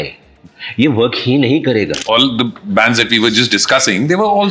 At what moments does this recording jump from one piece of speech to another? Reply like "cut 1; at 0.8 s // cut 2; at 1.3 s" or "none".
cut 1; at 2.0 s

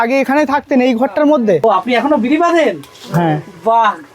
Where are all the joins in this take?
cut 1; at 1.6 s

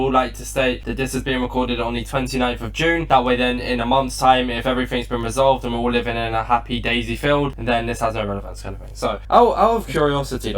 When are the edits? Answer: cut 1; at 9.2 s

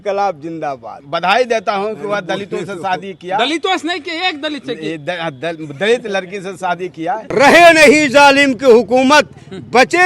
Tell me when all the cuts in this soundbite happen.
cut 1; at 1.0 s // cut 2; at 7.2 s

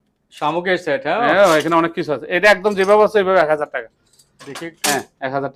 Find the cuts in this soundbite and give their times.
none

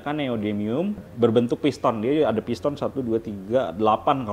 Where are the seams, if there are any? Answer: cut 1; at 1.1 s

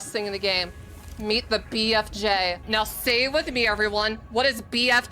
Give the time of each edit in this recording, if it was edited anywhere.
cut 1; at 2.6 s

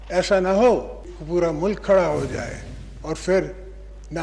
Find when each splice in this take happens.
cut 1; at 1.1 s

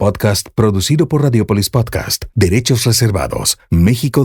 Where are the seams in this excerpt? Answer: none

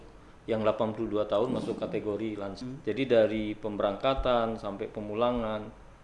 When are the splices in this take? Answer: cut 1; at 2.6 s

